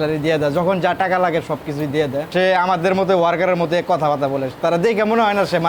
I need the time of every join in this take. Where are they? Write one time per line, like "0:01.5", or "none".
0:02.3